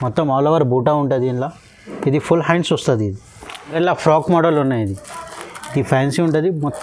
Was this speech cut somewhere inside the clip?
yes; 1 cut; at 3.7 s

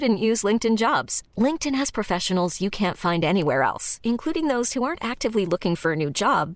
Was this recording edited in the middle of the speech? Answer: no; 0 cuts

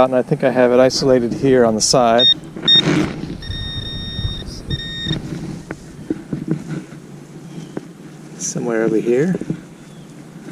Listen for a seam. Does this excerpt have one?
no; 0 cuts

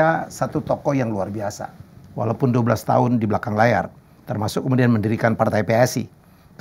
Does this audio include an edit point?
no; 0 cuts

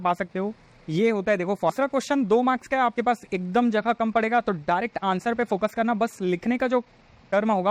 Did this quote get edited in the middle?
yes; 1 cut; at 1.7 s

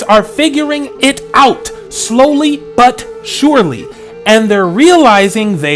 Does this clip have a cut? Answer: no; 0 cuts

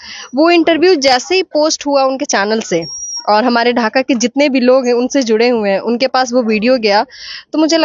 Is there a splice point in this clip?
no; 0 cuts

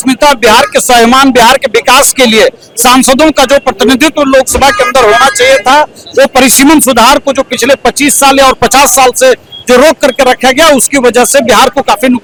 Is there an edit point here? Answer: no; 0 cuts

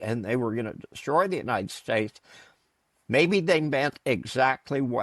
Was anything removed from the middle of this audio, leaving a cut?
no; 0 cuts

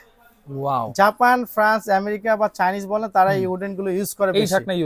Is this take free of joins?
yes; 0 cuts

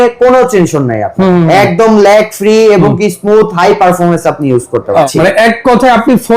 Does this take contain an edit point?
yes; 1 cut; at 5.1 s

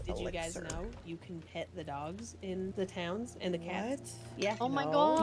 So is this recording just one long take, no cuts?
no; 1 cut; at 2.7 s

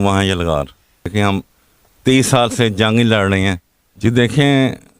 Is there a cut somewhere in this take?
yes; 2 cuts; at 1.1 s, 4.0 s

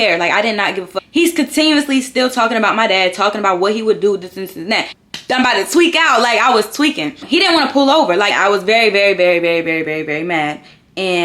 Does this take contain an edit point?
yes; 4 cuts; at 0.9 s, 5.0 s, 7.2 s, 8.3 s

